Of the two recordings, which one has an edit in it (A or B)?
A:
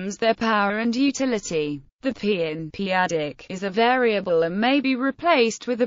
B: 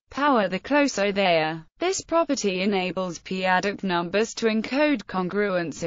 B